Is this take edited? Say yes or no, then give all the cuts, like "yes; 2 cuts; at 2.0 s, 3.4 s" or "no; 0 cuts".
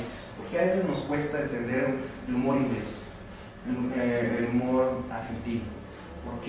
no; 0 cuts